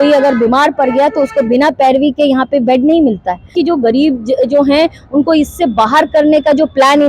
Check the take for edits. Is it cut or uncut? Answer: cut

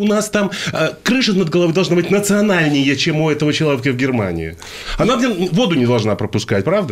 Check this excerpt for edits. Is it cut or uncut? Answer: uncut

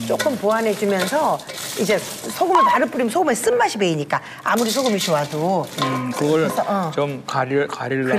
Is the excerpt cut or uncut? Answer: uncut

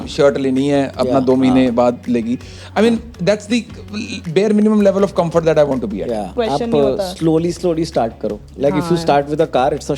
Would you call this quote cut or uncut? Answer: cut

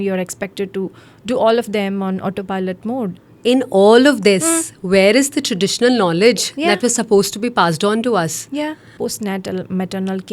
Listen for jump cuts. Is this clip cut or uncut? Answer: cut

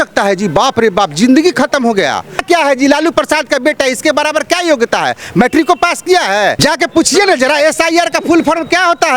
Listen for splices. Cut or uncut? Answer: cut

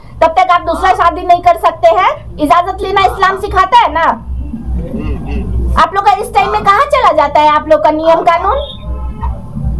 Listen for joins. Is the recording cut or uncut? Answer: uncut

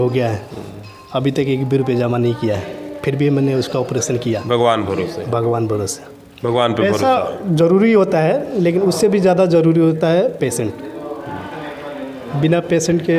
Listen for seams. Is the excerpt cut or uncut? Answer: uncut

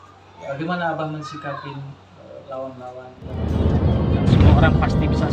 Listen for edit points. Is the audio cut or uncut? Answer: cut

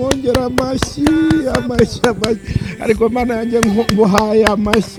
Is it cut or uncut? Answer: uncut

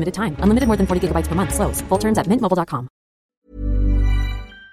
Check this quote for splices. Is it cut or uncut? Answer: cut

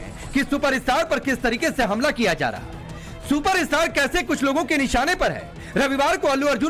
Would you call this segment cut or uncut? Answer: uncut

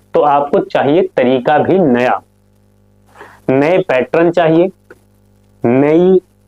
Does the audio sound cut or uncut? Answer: uncut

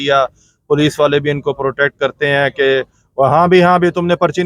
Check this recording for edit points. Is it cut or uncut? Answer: uncut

